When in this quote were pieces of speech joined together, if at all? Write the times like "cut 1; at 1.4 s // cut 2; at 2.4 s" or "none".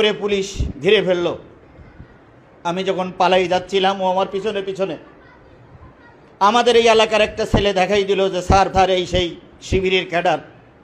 cut 1; at 8.7 s